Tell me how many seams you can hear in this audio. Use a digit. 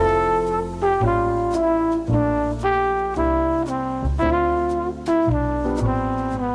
0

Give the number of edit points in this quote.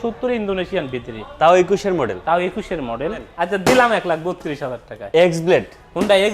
1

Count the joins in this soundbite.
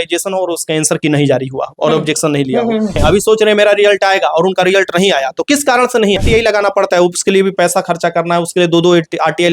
2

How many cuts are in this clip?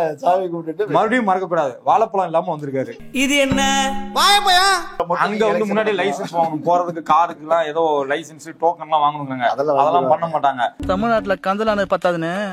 1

